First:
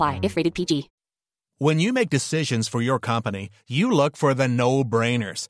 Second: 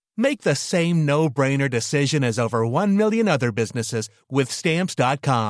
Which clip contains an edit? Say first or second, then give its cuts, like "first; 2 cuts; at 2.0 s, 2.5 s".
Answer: first; 1 cut; at 1.0 s